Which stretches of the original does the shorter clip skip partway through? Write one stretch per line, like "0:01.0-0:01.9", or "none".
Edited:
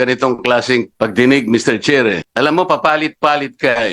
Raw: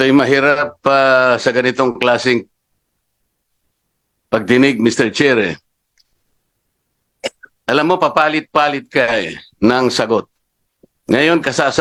0:02.5-0:04.2
0:05.6-0:07.6